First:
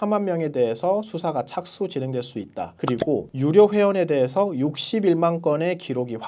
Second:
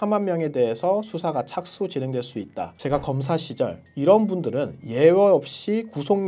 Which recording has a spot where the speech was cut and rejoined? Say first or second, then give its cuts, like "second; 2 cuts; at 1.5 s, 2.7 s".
second; 1 cut; at 2.7 s